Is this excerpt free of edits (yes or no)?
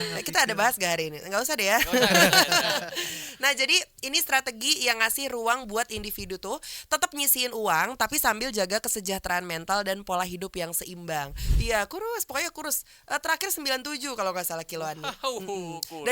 no